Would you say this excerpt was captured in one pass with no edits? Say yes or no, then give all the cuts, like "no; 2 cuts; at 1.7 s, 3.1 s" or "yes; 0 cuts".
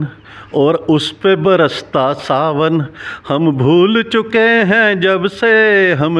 yes; 0 cuts